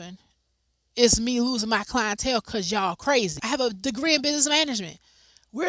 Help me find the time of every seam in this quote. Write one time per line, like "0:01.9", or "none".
0:03.4

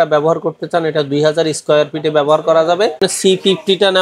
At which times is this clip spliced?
0:03.0

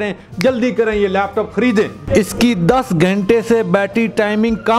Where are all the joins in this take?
0:02.0

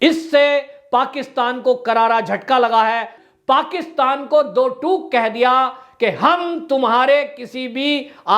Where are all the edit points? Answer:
0:03.1

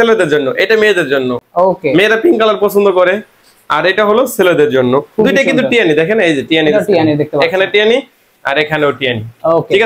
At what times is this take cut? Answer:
none

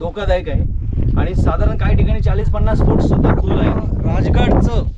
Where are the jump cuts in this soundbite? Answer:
0:03.9

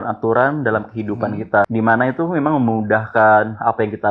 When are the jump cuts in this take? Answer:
0:01.7

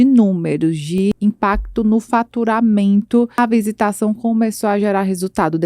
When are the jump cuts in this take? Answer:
0:01.1
0:03.4

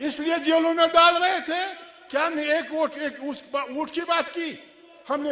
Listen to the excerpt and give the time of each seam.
none

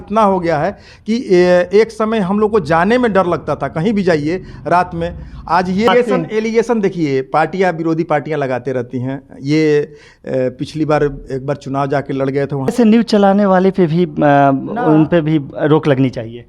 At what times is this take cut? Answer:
0:05.9
0:12.7

